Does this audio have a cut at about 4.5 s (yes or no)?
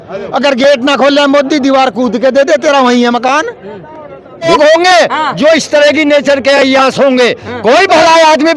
yes